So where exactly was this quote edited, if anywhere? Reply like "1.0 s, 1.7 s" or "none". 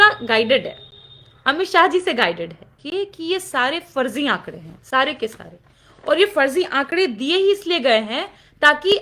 2.8 s

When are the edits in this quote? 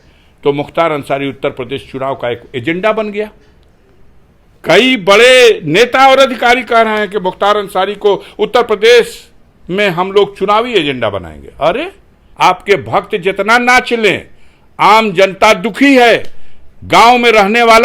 12.2 s

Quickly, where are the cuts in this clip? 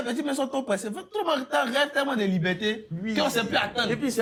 none

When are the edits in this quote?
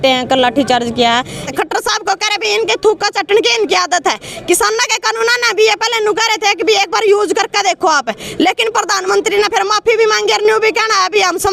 1.4 s

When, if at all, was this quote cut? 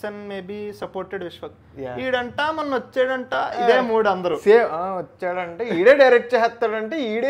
none

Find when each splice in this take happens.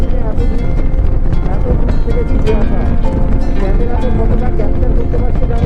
none

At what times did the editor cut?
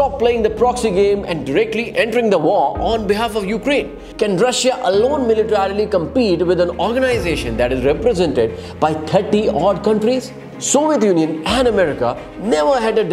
4.0 s, 10.5 s

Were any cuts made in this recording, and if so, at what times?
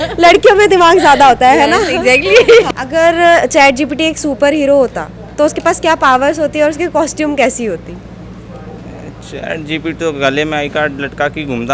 2.7 s

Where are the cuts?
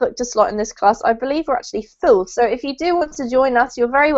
1.9 s

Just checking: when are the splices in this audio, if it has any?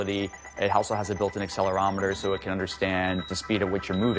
3.2 s

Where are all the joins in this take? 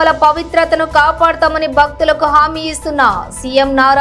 none

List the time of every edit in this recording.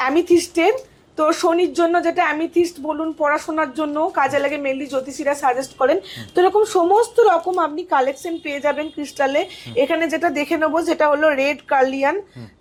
none

